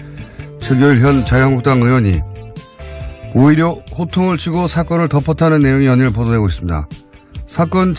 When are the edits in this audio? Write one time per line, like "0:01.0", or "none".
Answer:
none